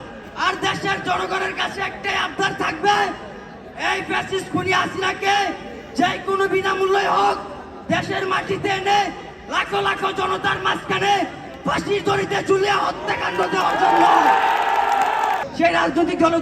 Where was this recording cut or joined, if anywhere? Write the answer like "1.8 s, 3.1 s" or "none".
15.5 s